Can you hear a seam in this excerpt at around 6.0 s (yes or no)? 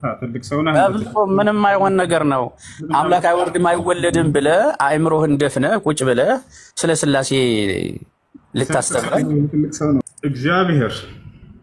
no